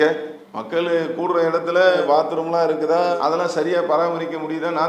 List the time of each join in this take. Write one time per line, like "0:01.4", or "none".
none